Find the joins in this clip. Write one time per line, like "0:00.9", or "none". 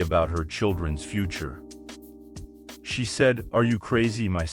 0:01.5
0:02.9